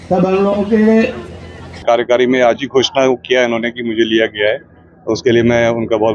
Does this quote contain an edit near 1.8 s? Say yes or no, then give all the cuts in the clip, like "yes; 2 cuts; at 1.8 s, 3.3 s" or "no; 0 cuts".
yes; 1 cut; at 1.8 s